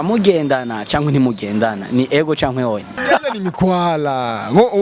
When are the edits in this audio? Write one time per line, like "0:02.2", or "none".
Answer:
0:03.0